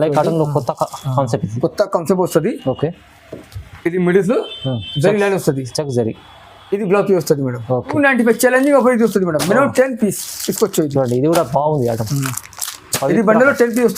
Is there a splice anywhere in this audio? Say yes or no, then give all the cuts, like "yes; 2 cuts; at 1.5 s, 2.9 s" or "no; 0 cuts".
yes; 1 cut; at 7.9 s